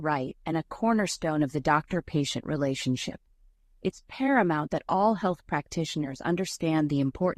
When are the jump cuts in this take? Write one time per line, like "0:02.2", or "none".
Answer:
0:01.5